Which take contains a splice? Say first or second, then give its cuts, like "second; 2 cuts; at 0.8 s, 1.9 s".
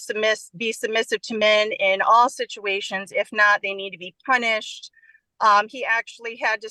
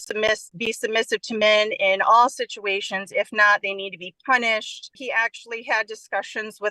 second; 1 cut; at 5.0 s